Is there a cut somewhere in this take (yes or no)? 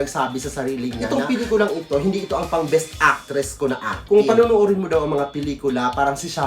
yes